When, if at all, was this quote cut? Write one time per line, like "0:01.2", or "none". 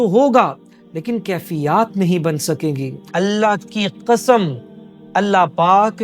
0:02.9